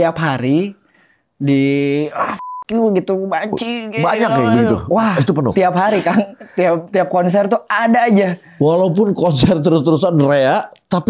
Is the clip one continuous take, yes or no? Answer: yes